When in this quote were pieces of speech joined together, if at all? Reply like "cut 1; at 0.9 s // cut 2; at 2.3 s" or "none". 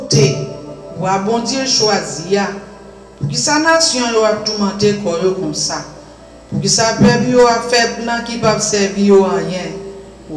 none